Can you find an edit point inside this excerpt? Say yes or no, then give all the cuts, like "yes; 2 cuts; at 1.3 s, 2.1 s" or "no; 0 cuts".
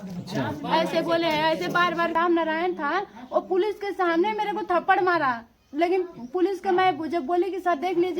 yes; 1 cut; at 2.1 s